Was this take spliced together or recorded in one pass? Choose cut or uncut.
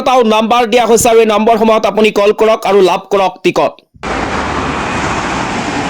cut